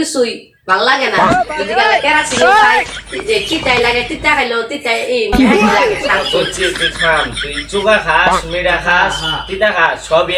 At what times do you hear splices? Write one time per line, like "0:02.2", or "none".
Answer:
none